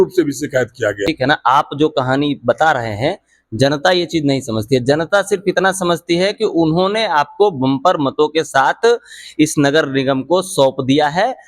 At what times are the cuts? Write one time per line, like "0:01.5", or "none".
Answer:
0:01.0